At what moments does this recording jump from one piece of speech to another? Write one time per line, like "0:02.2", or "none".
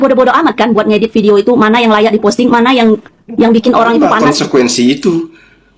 0:04.1